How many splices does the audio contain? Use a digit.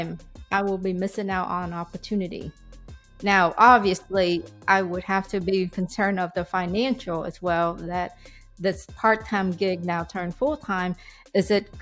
0